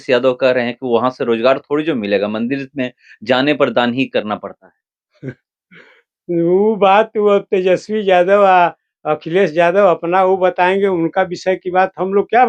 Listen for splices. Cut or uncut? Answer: uncut